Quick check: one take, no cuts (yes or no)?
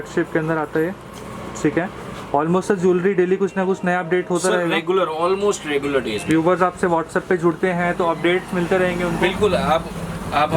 yes